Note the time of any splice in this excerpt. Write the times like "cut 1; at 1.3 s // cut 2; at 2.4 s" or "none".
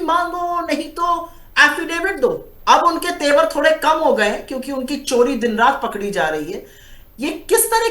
none